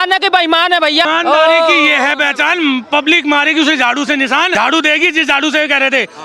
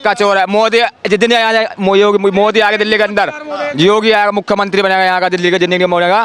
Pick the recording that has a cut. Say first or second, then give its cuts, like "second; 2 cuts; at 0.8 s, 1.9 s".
first; 2 cuts; at 1.1 s, 4.5 s